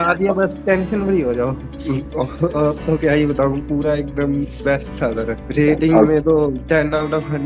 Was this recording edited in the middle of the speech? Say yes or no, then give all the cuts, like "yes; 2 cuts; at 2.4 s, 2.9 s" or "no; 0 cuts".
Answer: yes; 3 cuts; at 1.7 s, 5.4 s, 6.6 s